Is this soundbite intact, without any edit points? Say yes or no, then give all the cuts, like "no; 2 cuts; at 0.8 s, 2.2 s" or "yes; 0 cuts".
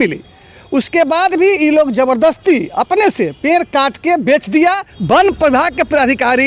no; 1 cut; at 4.9 s